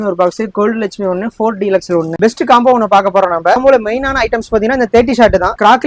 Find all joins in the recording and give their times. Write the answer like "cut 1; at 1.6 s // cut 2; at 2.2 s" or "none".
cut 1; at 2.1 s // cut 2; at 3.6 s